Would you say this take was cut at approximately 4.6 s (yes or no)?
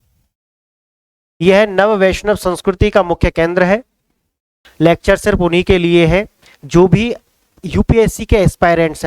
yes